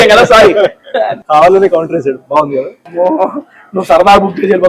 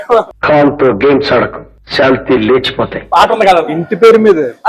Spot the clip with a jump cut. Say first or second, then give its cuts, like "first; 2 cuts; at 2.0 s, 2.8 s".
first; 2 cuts; at 1.2 s, 2.8 s